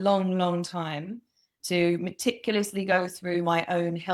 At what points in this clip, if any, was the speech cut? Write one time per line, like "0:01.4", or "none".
0:01.6